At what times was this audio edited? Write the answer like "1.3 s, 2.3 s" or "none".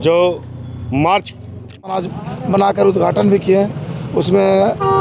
2.0 s